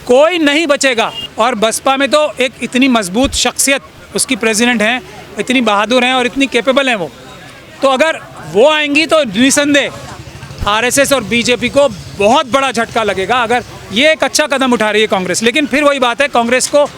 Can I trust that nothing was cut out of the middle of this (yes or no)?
no